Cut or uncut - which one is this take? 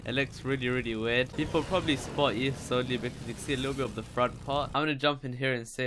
uncut